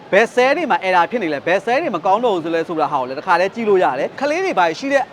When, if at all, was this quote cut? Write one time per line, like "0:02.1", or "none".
0:04.2